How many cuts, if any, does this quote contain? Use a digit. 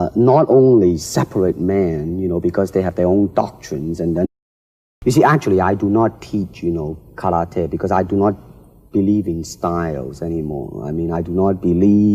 0